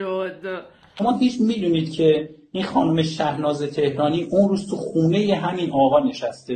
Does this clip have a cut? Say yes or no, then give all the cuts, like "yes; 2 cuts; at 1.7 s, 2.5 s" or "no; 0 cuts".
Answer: yes; 1 cut; at 1.0 s